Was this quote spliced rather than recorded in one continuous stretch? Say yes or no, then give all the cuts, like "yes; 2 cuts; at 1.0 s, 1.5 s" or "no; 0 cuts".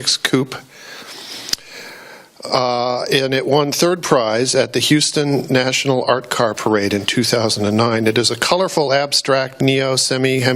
yes; 1 cut; at 8.4 s